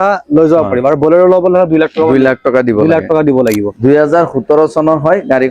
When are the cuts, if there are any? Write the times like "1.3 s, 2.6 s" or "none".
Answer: 3.7 s